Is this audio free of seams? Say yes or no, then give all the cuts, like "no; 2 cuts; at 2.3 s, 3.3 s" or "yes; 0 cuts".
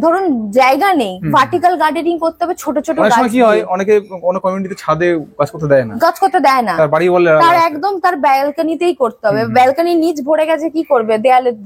yes; 0 cuts